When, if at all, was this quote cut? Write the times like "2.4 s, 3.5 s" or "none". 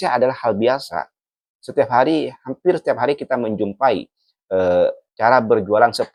none